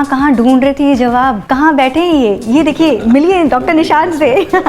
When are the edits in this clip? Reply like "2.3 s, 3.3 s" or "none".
1.4 s